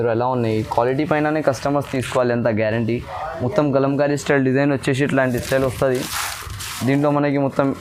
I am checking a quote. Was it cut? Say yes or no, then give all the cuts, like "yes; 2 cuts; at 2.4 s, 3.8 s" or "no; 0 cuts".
no; 0 cuts